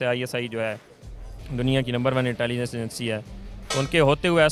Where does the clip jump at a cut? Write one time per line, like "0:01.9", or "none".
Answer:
none